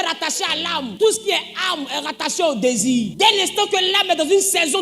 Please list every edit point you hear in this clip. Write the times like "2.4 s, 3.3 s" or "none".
0.9 s, 3.1 s